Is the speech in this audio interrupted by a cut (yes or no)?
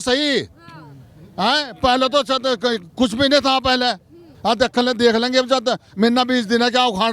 yes